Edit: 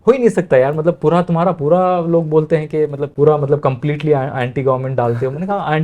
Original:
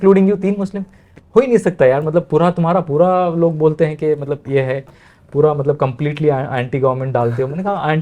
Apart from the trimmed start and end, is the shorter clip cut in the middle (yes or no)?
yes